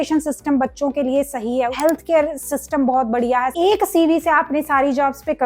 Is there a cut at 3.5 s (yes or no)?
yes